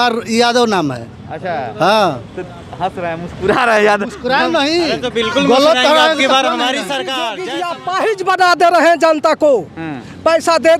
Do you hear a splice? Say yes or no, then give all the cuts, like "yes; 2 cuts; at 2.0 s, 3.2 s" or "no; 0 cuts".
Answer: yes; 1 cut; at 7.2 s